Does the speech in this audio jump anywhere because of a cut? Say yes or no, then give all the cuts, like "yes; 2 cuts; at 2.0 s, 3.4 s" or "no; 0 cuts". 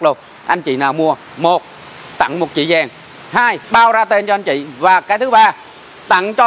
yes; 2 cuts; at 1.3 s, 3.6 s